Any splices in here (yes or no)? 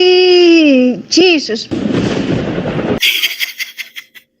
yes